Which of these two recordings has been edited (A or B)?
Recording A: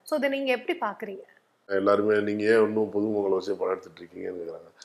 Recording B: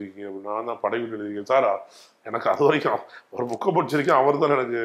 A